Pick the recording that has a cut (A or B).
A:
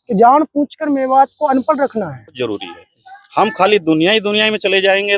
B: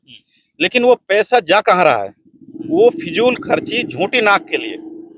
A